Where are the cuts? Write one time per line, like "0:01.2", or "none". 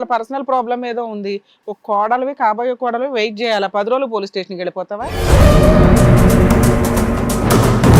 0:05.1